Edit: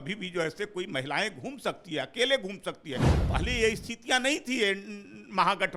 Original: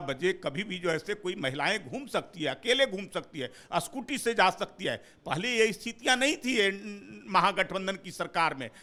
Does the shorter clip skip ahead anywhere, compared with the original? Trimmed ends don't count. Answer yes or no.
yes